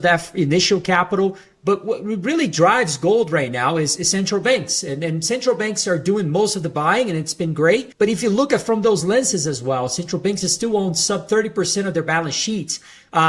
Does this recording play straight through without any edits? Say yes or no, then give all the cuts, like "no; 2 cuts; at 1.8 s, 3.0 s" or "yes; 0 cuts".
no; 1 cut; at 7.9 s